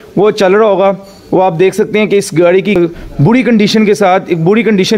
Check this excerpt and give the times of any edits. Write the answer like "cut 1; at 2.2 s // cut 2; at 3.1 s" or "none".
cut 1; at 2.8 s